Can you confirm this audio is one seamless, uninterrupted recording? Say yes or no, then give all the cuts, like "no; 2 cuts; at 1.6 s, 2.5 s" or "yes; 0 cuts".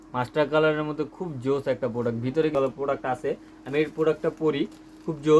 no; 1 cut; at 2.5 s